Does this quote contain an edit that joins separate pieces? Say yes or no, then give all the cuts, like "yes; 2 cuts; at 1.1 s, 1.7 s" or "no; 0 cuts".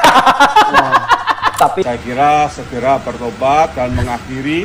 yes; 1 cut; at 1.8 s